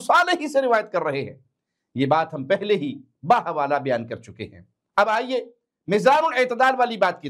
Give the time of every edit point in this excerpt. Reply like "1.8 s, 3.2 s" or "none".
none